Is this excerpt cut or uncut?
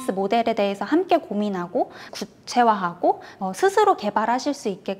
cut